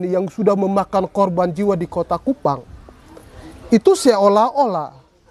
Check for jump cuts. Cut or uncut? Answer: uncut